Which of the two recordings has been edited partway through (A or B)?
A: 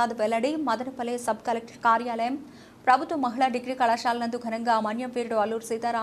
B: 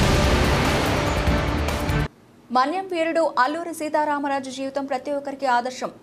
B